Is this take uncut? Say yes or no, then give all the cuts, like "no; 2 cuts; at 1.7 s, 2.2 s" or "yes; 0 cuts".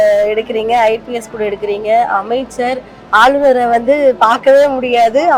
yes; 0 cuts